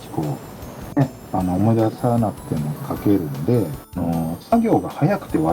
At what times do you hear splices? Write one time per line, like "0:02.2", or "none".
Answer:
0:03.8